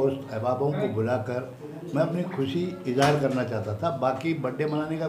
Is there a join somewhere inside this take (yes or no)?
no